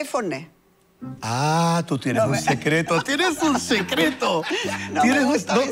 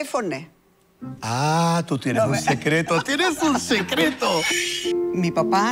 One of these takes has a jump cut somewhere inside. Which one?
second; 1 cut; at 4.5 s

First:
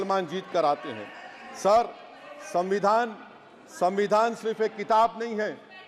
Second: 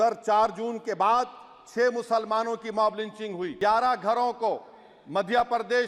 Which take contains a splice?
second; 1 cut; at 3.5 s

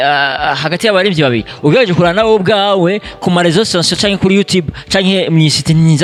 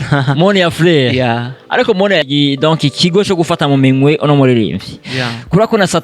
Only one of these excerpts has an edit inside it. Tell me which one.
second; 1 cut; at 2.3 s

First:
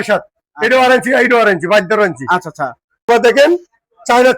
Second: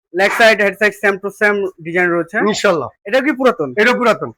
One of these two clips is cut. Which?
first; 1 cut; at 3.1 s

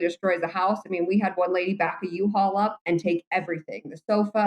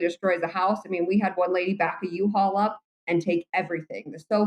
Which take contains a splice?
first; 1 cut; at 2.8 s

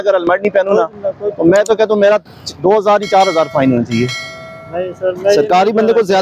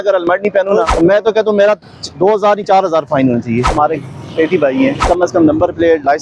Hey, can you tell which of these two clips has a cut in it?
second; 3 cuts; at 0.9 s, 3.7 s, 5.1 s

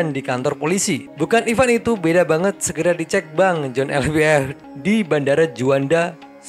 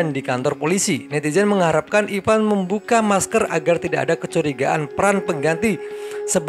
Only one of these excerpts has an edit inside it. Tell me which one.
first; 2 cuts; at 1.1 s, 4.6 s

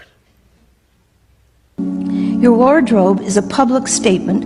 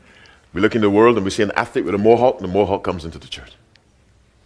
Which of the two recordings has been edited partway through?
first; 1 cut; at 1.8 s

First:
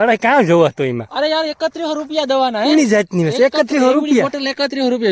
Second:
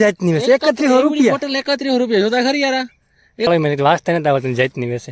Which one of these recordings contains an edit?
second; 1 cut; at 3.5 s

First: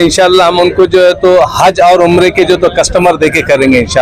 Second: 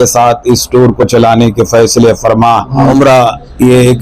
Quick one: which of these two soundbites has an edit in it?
second; 1 cut; at 2.9 s

